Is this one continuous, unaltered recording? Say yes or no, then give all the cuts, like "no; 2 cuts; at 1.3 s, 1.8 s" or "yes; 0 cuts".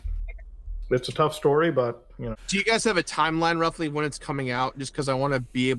no; 1 cut; at 2.4 s